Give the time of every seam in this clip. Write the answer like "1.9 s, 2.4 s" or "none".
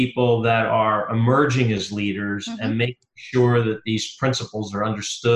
none

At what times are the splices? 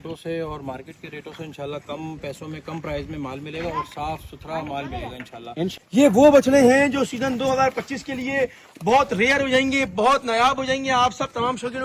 5.8 s

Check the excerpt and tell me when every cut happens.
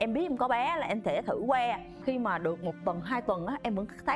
1.9 s

